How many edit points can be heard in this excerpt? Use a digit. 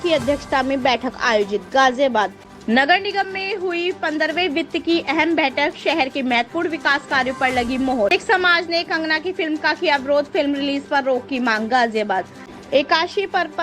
3